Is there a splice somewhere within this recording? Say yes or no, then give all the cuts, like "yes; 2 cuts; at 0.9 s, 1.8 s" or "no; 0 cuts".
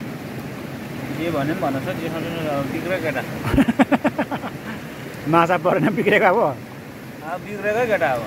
no; 0 cuts